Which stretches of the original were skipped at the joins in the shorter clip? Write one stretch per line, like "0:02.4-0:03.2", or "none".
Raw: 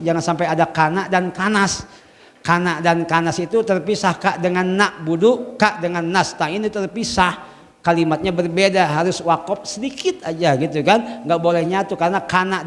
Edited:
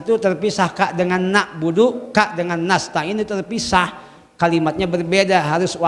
none